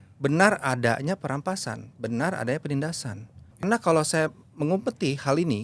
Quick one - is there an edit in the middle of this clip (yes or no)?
yes